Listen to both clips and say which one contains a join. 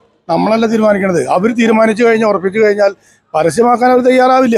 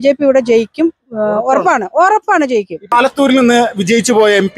second; 1 cut; at 2.9 s

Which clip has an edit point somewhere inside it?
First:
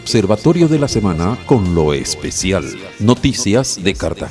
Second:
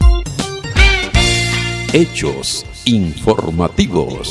second; 1 cut; at 1.2 s

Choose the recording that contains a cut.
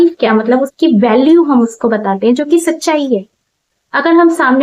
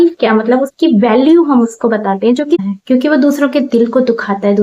second; 1 cut; at 2.6 s

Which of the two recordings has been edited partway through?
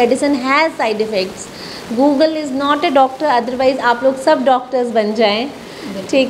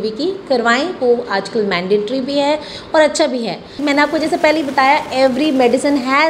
second; 1 cut; at 3.7 s

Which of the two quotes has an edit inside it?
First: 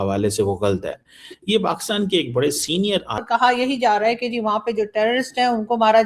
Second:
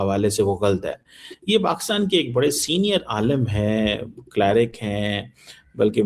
first; 1 cut; at 3.2 s

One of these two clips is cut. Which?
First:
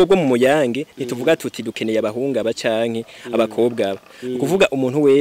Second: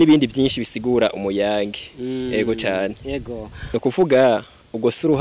second; 1 cut; at 3.7 s

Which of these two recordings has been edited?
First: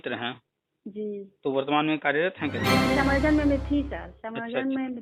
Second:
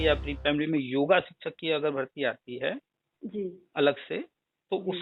first; 1 cut; at 2.8 s

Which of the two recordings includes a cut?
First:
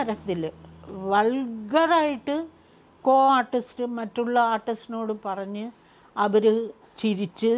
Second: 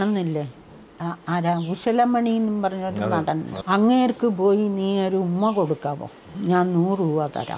second; 2 cuts; at 3.5 s, 6.3 s

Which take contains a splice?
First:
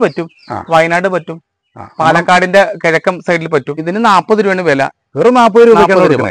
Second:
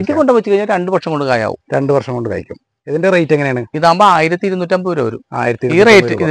first; 1 cut; at 3.8 s

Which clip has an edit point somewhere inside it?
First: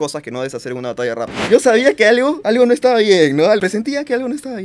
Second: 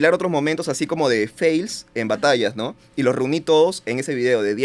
first; 3 cuts; at 1.4 s, 2.4 s, 3.6 s

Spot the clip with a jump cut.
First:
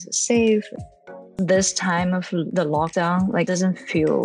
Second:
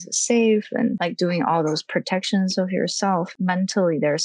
first; 1 cut; at 1.0 s

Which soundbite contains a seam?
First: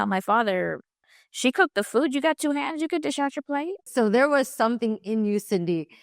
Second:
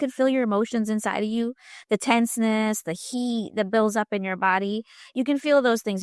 first; 1 cut; at 3.9 s

